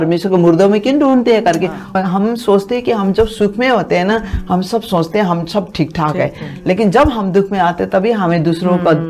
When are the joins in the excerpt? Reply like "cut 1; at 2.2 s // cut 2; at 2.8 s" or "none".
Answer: cut 1; at 1.8 s